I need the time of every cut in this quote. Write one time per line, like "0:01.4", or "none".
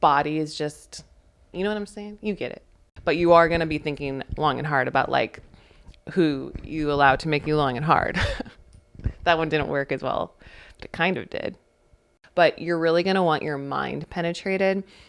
0:02.8
0:12.1